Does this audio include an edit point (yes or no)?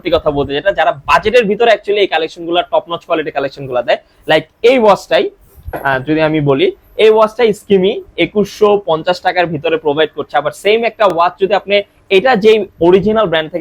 no